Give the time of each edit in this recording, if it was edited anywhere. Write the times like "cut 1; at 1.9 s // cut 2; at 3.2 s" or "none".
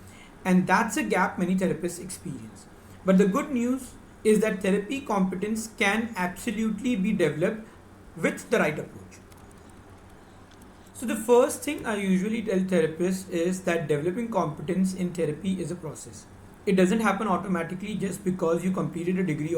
cut 1; at 10.9 s